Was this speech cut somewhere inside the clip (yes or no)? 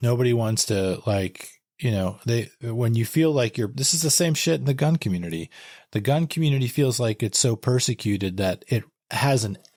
no